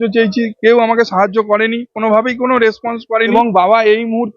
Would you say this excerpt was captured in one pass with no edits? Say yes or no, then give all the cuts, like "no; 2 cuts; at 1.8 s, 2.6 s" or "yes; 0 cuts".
no; 1 cut; at 3.3 s